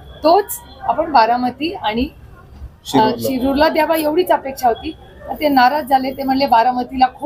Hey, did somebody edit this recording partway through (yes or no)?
no